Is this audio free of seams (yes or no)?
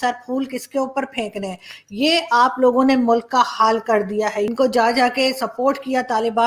no